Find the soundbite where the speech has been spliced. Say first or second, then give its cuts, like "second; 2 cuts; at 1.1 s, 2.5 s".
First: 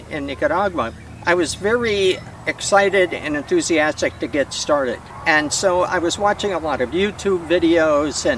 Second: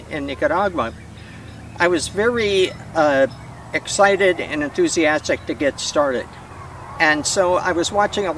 first; 3 cuts; at 1.0 s, 2.3 s, 5.1 s